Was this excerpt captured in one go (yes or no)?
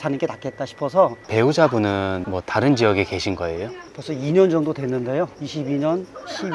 no